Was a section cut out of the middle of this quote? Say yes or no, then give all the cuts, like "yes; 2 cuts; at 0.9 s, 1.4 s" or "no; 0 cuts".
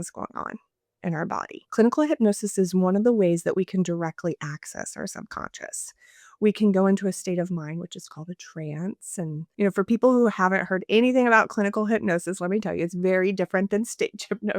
yes; 2 cuts; at 1.6 s, 9.5 s